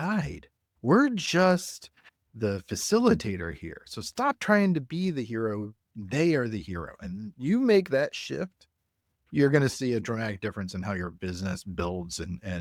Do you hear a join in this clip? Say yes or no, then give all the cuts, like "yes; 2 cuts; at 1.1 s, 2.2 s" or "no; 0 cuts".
no; 0 cuts